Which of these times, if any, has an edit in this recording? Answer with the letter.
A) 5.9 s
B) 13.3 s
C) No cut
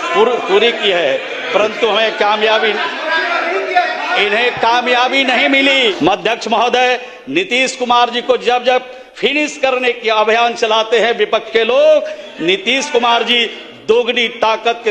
A